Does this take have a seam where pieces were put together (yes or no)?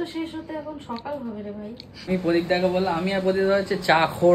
yes